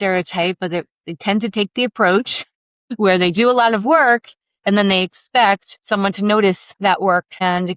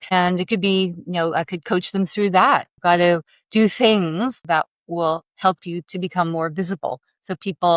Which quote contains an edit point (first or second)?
second